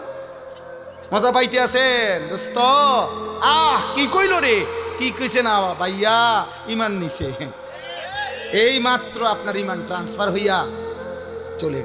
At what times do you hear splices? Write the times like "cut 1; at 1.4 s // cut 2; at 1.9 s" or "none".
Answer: none